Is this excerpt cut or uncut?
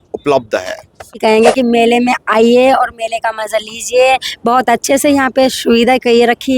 cut